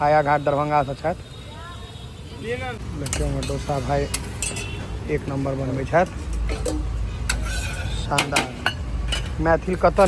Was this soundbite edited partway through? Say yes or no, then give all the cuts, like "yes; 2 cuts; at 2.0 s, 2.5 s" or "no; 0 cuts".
no; 0 cuts